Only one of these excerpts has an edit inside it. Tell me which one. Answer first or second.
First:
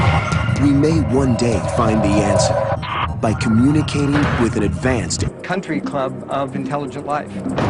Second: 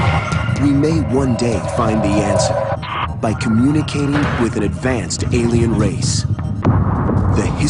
second